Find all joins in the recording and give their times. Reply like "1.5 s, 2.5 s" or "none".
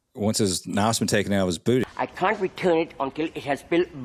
none